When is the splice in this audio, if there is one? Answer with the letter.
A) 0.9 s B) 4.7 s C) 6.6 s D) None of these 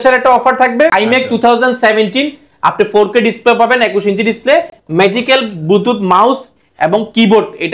A